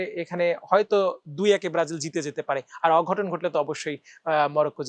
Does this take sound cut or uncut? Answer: uncut